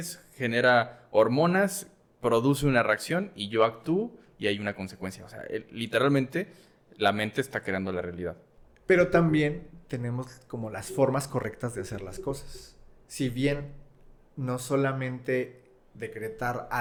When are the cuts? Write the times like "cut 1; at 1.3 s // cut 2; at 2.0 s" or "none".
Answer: none